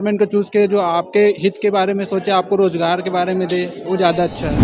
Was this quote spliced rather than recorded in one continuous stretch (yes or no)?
no